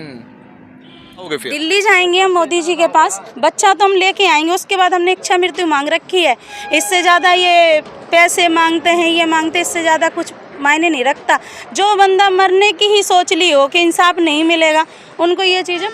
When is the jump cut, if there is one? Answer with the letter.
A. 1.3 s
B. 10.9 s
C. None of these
A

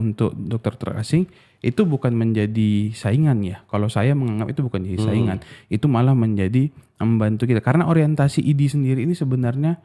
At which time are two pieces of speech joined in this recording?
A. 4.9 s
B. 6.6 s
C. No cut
C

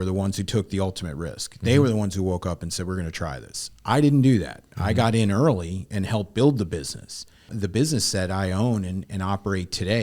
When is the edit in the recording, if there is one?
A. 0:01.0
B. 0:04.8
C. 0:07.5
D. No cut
C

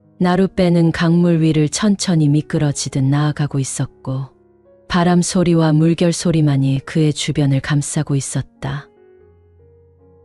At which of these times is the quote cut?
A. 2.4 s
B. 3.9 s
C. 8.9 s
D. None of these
D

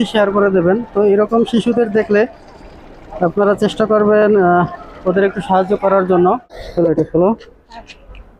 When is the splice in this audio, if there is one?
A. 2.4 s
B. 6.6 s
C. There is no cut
B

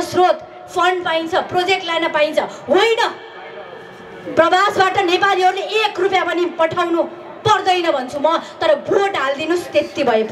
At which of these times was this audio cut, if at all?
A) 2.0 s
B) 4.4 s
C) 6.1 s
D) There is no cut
D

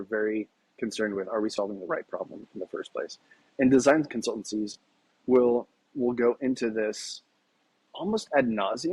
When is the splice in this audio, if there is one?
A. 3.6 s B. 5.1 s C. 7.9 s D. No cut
D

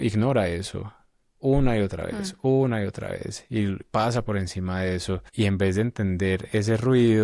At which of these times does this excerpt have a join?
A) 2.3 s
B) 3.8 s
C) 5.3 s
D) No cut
C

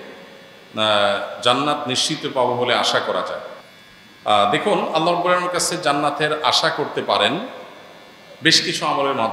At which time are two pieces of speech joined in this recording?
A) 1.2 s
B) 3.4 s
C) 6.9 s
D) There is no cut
D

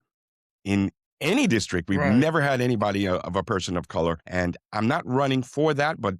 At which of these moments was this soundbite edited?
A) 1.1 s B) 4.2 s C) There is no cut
B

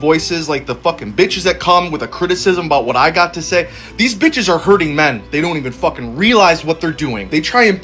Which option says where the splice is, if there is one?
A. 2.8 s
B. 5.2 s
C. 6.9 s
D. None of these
C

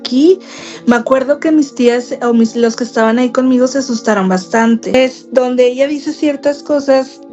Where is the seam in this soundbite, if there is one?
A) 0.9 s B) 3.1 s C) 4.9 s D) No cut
C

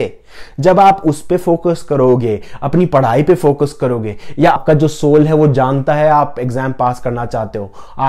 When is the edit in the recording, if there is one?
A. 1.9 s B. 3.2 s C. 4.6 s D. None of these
C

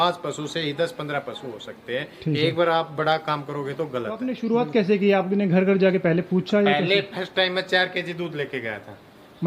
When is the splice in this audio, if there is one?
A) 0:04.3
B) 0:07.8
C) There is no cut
A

